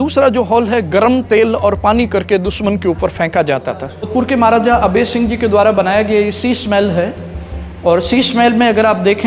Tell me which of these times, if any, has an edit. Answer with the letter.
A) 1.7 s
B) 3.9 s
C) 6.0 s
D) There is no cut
B